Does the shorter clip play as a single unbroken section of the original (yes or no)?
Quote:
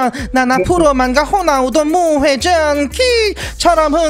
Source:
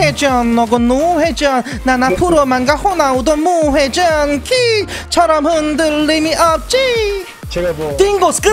yes